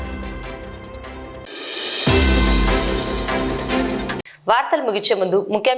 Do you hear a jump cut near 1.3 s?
no; 0 cuts

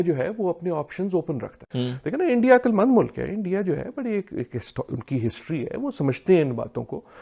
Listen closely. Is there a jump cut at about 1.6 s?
yes; 1 cut; at 1.6 s

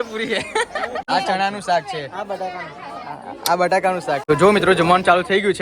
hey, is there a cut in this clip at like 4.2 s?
yes; 2 cuts; at 1.1 s, 4.2 s

